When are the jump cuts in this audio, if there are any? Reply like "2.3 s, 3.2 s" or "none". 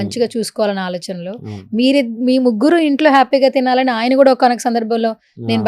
none